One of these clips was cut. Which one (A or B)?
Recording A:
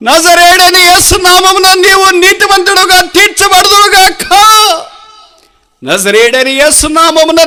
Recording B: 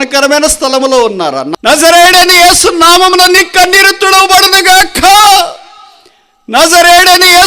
B